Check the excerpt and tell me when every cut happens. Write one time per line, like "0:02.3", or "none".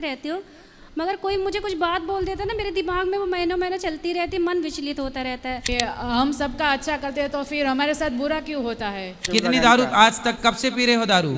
0:05.7
0:09.2